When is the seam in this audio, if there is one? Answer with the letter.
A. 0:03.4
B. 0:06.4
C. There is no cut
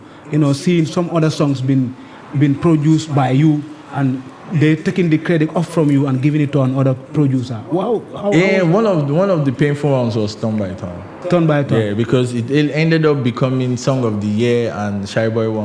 C